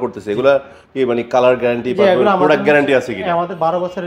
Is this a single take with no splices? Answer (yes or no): yes